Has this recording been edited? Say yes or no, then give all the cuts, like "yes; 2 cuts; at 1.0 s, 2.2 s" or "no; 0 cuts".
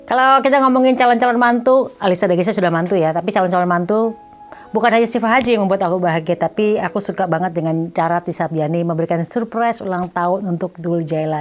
no; 0 cuts